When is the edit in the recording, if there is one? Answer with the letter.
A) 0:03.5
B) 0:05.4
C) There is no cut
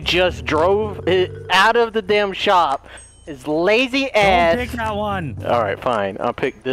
B